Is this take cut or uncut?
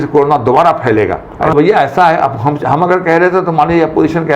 cut